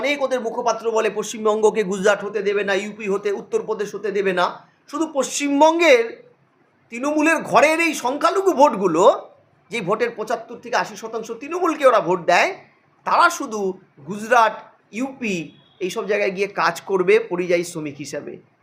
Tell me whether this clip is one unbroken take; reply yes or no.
yes